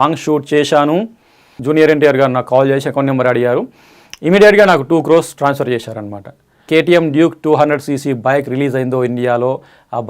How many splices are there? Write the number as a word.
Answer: two